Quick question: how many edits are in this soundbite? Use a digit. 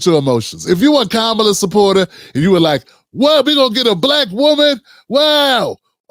0